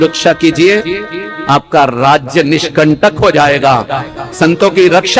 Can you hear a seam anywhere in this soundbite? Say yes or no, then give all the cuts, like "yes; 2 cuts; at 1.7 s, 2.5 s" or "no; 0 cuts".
no; 0 cuts